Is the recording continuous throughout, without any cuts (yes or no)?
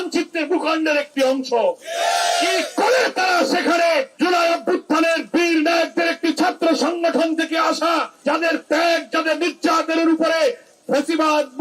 no